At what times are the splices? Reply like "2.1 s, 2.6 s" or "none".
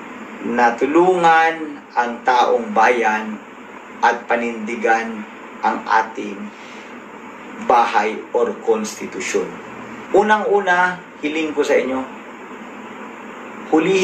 9.9 s